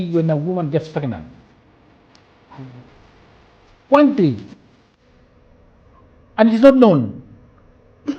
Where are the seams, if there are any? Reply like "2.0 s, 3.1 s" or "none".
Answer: none